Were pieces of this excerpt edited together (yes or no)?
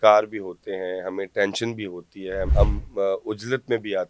yes